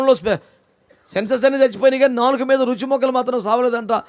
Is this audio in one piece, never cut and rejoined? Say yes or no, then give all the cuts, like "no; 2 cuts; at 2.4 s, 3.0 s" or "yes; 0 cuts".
yes; 0 cuts